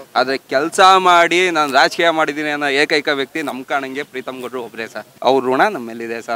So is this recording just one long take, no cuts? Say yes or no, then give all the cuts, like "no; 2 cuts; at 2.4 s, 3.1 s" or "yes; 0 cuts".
no; 1 cut; at 5.0 s